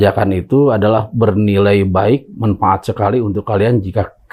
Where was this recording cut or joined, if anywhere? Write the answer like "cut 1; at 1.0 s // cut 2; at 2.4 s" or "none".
none